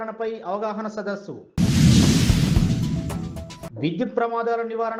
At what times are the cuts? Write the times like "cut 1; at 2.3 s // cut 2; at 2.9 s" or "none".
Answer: none